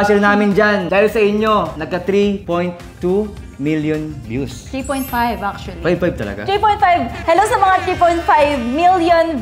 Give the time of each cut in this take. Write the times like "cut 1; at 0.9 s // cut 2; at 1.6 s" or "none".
cut 1; at 0.9 s // cut 2; at 2.1 s